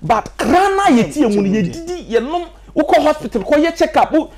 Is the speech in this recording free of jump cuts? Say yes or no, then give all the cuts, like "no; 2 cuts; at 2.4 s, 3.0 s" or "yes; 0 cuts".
yes; 0 cuts